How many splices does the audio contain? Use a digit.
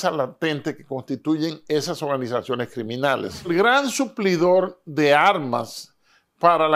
1